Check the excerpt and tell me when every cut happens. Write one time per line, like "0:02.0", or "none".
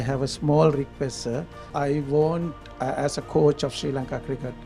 0:01.6